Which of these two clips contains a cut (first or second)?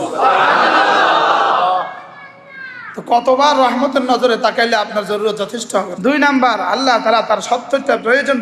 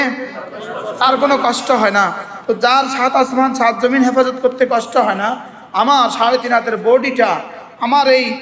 first